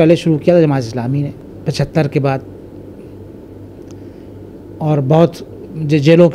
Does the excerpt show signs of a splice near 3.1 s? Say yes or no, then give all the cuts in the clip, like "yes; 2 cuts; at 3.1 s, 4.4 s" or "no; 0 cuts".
no; 1 cut; at 1.5 s